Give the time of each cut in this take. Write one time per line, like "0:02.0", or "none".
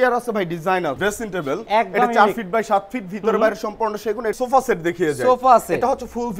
0:01.0
0:04.3